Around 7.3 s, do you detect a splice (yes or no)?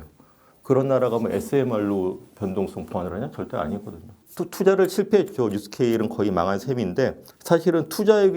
yes